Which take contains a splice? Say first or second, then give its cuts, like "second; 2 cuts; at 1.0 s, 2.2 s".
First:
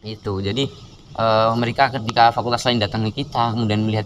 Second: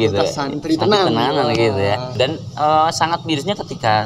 second; 1 cut; at 2.1 s